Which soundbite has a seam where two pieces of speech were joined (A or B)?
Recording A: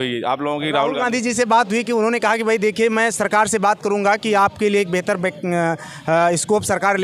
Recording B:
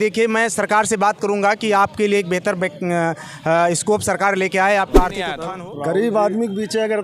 B